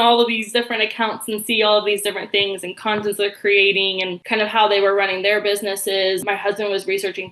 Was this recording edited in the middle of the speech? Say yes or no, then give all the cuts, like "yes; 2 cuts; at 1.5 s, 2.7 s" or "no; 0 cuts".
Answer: yes; 2 cuts; at 4.1 s, 6.2 s